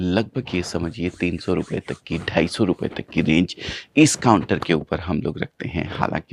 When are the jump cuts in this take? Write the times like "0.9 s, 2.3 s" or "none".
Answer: none